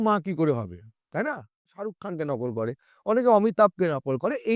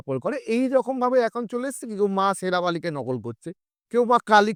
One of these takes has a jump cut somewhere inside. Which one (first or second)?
first